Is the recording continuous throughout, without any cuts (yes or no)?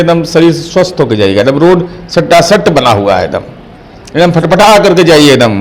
yes